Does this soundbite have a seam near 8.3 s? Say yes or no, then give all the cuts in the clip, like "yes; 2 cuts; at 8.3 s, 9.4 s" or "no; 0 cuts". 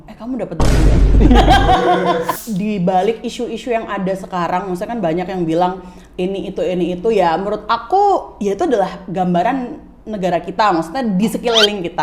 no; 1 cut; at 2.4 s